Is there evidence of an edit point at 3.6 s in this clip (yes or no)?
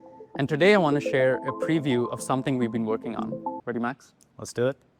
yes